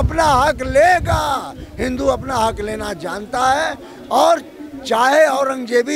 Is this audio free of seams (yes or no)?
yes